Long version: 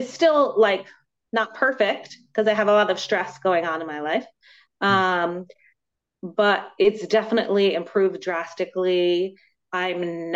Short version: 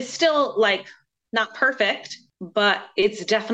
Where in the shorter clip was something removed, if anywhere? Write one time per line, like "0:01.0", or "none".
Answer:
0:02.1